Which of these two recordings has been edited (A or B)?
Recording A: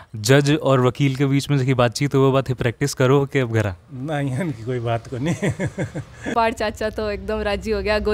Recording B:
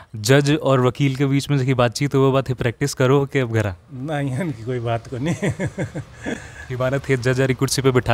A